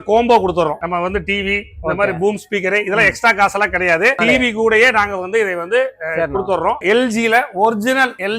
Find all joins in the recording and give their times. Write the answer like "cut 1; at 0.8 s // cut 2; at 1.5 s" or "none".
cut 1; at 4.2 s // cut 2; at 6.8 s